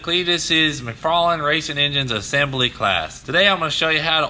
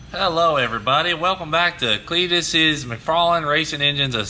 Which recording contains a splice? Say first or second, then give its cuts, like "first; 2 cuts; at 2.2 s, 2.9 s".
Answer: first; 1 cut; at 3.2 s